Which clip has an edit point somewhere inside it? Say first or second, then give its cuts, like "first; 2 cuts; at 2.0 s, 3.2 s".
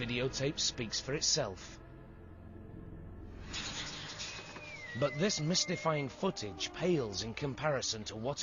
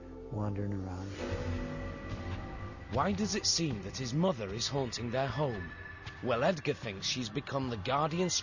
first; 1 cut; at 1.9 s